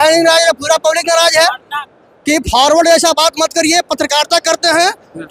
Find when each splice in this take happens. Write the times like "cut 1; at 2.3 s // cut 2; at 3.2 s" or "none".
cut 1; at 1.8 s

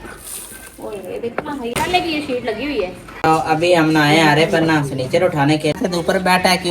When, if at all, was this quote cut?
cut 1; at 1.7 s // cut 2; at 3.2 s // cut 3; at 5.8 s

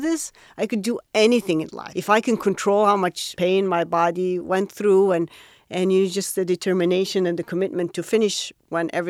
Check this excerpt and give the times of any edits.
cut 1; at 1.9 s // cut 2; at 3.2 s

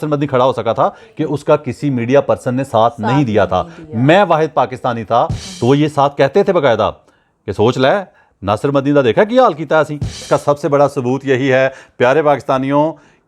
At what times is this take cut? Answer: cut 1; at 5.4 s // cut 2; at 10.2 s

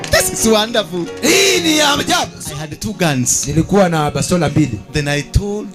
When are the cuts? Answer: cut 1; at 2.5 s

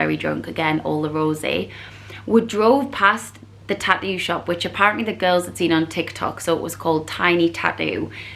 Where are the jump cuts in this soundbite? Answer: none

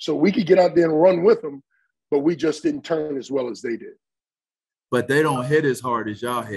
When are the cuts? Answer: cut 1; at 4.4 s

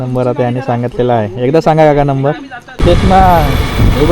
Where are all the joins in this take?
cut 1; at 2.8 s

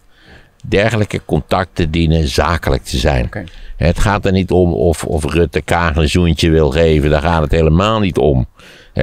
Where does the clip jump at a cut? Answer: none

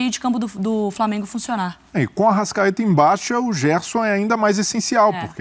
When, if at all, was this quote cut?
none

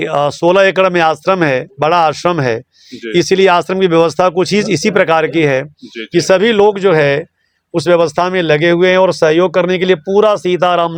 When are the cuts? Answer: none

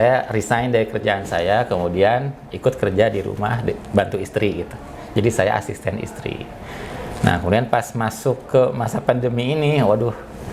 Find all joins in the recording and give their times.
none

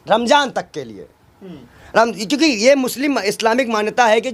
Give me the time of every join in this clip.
none

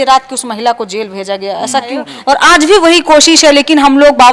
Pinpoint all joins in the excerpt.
cut 1; at 2.1 s

